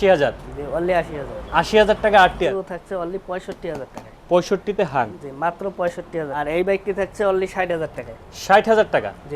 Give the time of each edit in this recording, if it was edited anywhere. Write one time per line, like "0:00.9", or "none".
0:02.5
0:06.4